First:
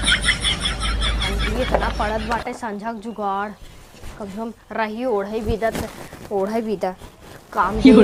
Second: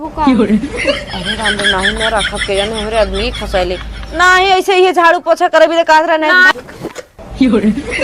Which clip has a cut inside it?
second; 1 cut; at 6.5 s

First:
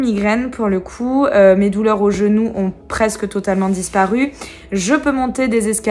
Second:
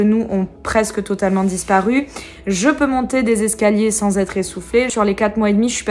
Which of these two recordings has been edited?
second; 1 cut; at 4.9 s

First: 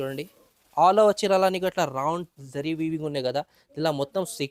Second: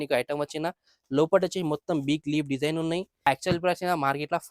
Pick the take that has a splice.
second; 1 cut; at 3.2 s

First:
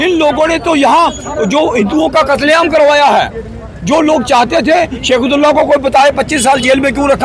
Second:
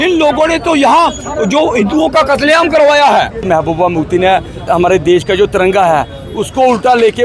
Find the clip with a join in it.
second; 2 cuts; at 3.4 s, 4.6 s

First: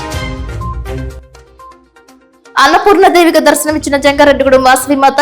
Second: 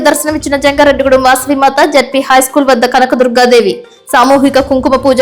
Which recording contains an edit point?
first; 1 cut; at 1.8 s

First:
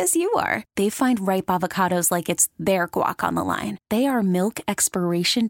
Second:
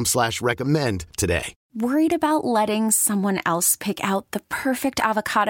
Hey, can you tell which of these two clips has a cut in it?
second; 1 cut; at 1.6 s

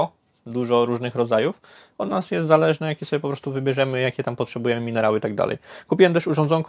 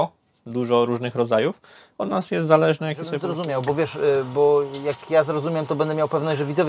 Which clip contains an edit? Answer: second; 1 cut; at 3.3 s

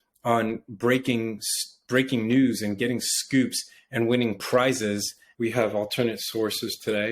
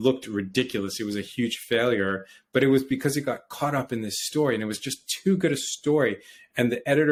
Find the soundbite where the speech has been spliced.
first; 1 cut; at 5.2 s

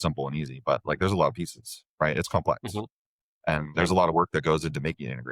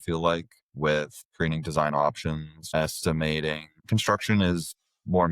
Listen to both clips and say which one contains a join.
second; 3 cuts; at 1.2 s, 2.5 s, 3.7 s

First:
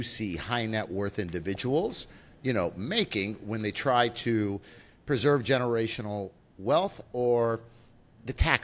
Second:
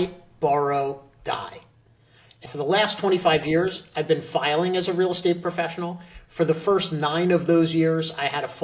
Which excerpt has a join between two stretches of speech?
second; 1 cut; at 2.5 s

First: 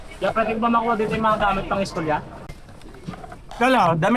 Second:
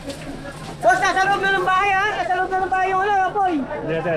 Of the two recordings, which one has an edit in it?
first; 1 cut; at 2.4 s

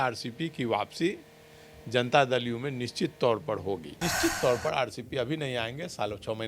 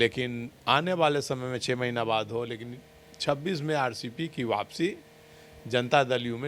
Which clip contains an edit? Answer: first; 1 cut; at 3.9 s

